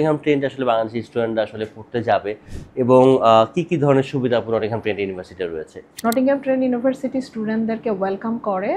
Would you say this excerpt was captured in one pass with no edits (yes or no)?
no